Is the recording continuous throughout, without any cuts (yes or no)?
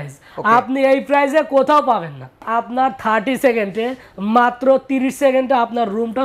no